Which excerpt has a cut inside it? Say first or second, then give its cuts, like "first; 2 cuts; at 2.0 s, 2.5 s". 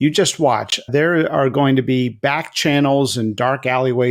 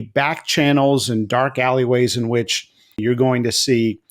second; 1 cut; at 3.0 s